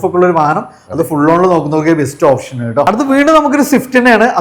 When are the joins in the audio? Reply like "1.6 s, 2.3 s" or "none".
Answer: none